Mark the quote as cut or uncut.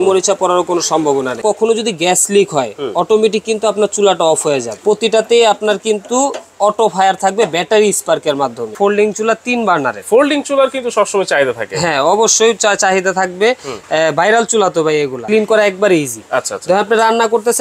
cut